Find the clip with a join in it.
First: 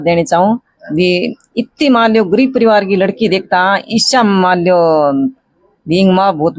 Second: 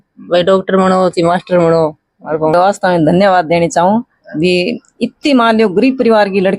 second; 1 cut; at 2.5 s

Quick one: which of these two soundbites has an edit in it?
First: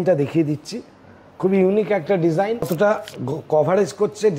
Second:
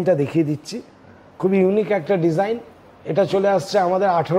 first; 1 cut; at 2.7 s

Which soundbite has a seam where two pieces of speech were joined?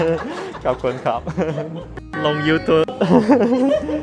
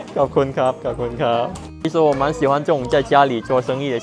second; 1 cut; at 1.6 s

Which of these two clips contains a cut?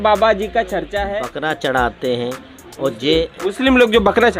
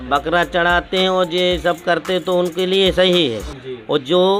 first; 1 cut; at 1.0 s

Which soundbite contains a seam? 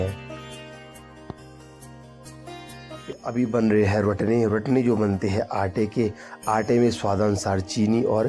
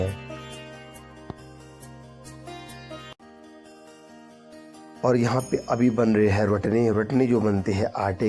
first; 1 cut; at 3.2 s

